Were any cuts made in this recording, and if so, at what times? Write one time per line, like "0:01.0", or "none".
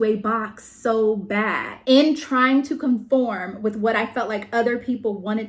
0:01.7